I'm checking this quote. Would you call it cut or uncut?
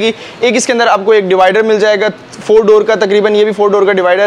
uncut